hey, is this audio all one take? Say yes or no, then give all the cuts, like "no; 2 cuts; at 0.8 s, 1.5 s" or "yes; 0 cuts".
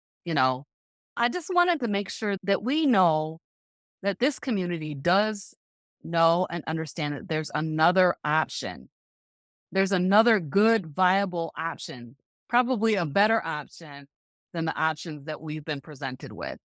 no; 2 cuts; at 1.2 s, 2.4 s